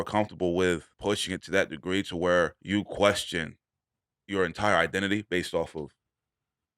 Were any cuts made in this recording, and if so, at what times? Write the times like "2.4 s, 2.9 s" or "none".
0.9 s, 2.6 s

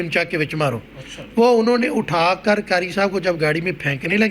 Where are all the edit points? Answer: none

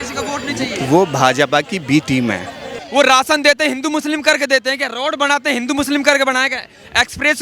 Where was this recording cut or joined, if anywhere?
2.8 s

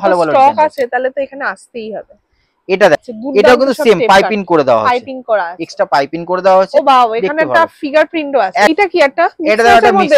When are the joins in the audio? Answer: 3.0 s, 8.7 s

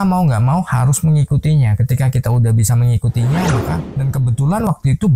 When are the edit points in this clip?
3.8 s

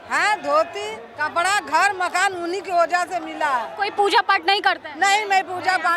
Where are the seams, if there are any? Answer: 1.1 s, 3.7 s

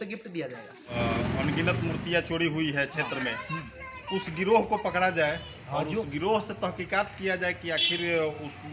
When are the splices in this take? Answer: 0.9 s

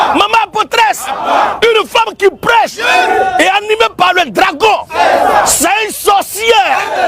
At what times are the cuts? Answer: none

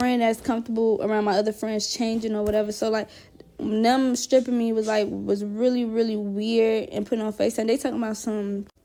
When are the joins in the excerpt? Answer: none

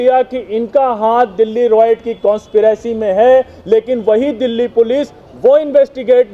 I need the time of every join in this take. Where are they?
none

